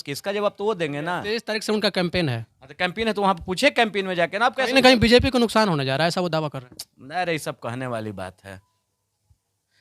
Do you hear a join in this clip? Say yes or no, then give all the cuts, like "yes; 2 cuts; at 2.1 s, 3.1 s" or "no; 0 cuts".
yes; 1 cut; at 1.4 s